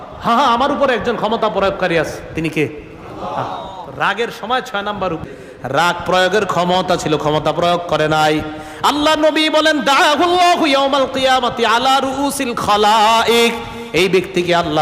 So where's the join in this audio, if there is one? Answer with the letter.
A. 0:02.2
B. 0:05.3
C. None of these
B